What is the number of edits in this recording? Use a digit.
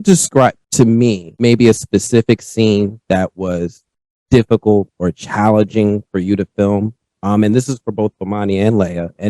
1